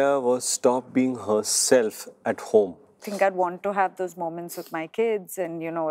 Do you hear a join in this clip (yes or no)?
yes